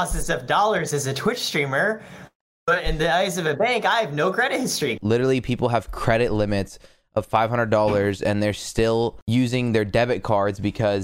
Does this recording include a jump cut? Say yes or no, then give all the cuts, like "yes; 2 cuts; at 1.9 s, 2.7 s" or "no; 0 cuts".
yes; 2 cuts; at 5.0 s, 9.2 s